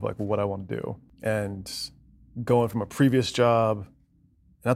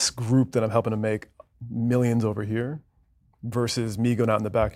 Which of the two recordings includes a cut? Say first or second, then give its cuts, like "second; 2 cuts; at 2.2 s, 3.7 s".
first; 1 cut; at 1.1 s